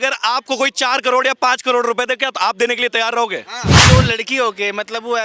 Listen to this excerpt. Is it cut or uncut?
cut